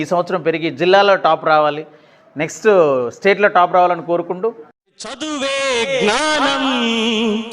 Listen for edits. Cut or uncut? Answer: cut